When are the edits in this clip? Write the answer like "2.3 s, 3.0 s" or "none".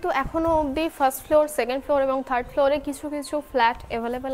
none